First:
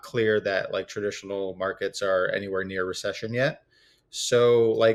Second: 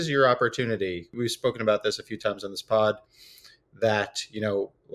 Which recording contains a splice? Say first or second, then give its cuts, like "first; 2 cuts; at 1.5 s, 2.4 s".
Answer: second; 1 cut; at 1.1 s